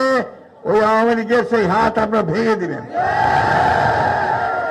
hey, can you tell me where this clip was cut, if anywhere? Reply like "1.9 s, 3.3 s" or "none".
none

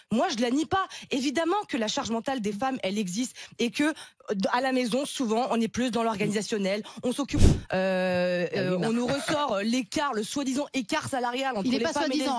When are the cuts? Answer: 7.4 s

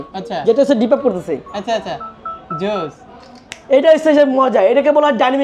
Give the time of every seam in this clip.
none

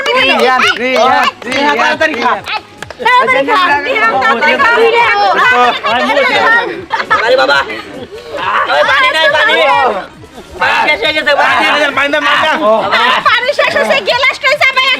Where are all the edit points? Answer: 6.9 s

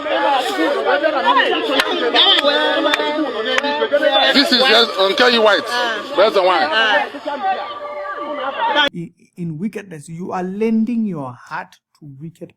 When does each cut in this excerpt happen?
8.9 s

